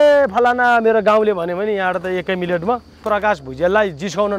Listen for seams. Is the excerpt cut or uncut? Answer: cut